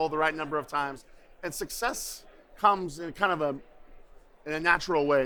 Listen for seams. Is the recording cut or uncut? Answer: uncut